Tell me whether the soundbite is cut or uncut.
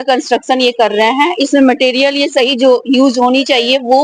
uncut